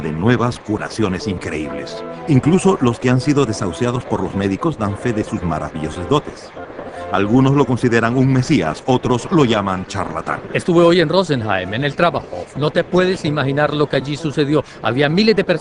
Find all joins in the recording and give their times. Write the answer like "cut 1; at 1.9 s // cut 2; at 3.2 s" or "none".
cut 1; at 7.9 s